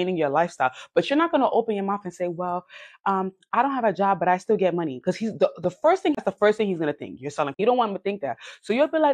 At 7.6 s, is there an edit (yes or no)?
yes